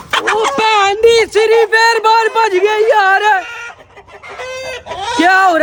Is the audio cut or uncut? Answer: uncut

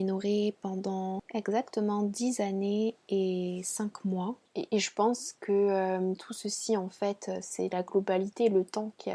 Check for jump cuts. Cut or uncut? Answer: cut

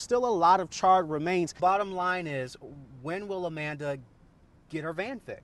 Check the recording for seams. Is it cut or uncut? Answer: cut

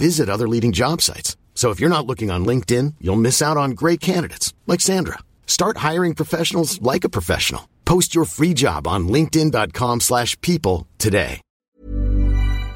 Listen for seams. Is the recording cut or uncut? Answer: cut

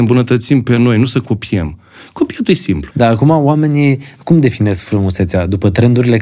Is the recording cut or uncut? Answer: cut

